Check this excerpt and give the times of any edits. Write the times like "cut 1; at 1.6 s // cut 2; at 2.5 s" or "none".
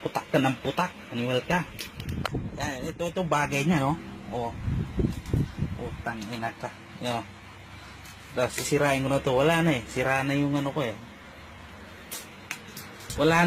none